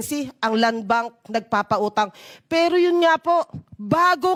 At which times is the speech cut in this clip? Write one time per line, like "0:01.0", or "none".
none